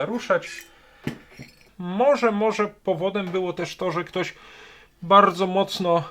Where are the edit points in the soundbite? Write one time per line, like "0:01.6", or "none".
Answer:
0:01.7